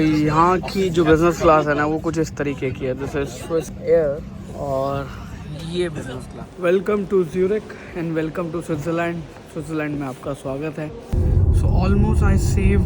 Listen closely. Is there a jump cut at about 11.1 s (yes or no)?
yes